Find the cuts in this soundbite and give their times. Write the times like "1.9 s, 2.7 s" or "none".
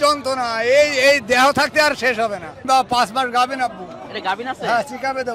2.6 s